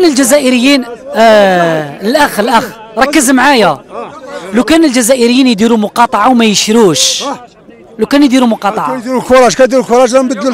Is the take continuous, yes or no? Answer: yes